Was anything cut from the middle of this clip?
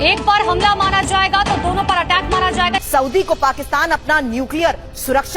yes; 1 cut; at 2.8 s

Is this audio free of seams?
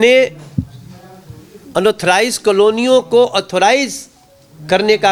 yes; 0 cuts

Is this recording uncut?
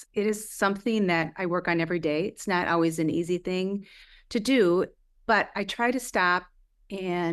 yes; 0 cuts

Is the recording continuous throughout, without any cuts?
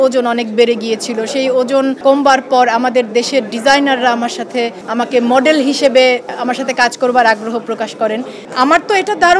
no; 3 cuts; at 2.0 s, 4.8 s, 8.4 s

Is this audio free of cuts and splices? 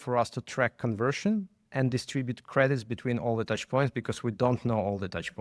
no; 1 cut; at 2.4 s

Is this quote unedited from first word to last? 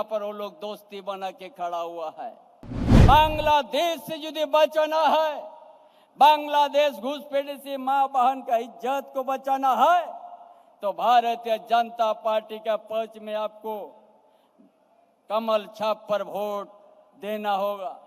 no; 1 cut; at 2.9 s

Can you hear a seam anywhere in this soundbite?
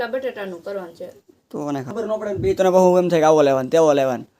yes; 1 cut; at 1.9 s

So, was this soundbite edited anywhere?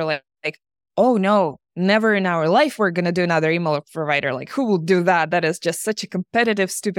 no; 0 cuts

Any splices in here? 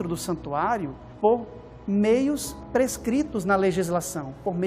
yes; 2 cuts; at 1.0 s, 2.5 s

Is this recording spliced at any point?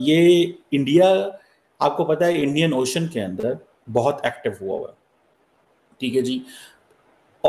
no; 0 cuts

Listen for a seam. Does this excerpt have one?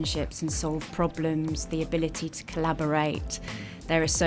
no; 0 cuts

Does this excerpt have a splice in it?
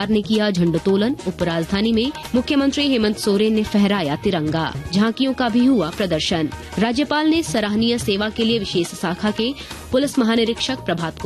yes; 3 cuts; at 2.2 s, 4.7 s, 6.6 s

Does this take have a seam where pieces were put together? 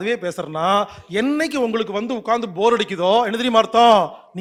no; 0 cuts

